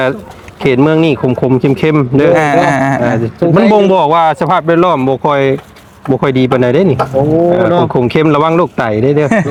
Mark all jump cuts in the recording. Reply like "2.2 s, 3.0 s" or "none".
none